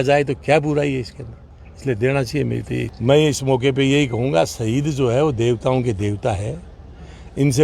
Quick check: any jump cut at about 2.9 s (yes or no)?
yes